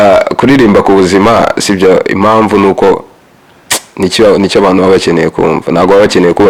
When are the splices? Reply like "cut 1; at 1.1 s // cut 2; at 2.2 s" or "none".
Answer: none